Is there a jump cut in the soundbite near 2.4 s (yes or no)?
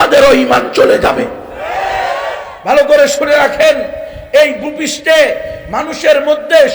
yes